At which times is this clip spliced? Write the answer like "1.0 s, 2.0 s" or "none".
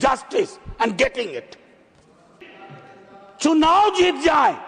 2.4 s